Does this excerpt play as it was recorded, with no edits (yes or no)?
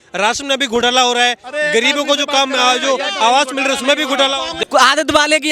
no